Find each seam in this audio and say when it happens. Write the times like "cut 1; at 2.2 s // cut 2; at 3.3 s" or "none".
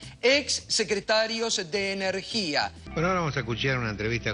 cut 1; at 2.8 s